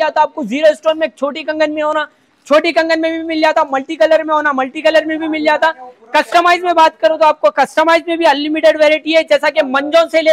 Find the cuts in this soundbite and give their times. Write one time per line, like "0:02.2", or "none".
none